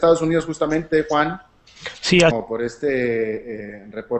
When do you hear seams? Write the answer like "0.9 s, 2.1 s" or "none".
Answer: none